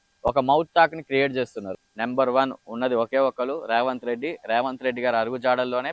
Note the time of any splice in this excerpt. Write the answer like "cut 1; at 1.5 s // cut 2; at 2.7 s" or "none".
cut 1; at 1.8 s